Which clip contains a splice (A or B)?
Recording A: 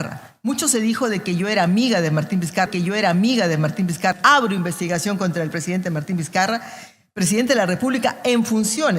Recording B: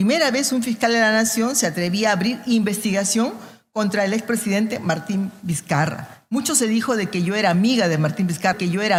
A